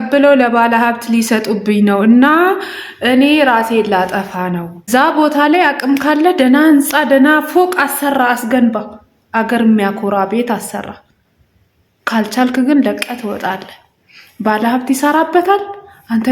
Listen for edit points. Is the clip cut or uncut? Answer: cut